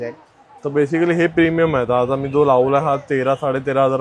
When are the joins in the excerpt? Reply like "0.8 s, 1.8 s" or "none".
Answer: none